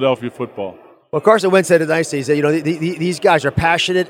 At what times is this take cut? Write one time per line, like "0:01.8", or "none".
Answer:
none